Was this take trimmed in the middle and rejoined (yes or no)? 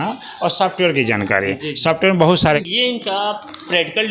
yes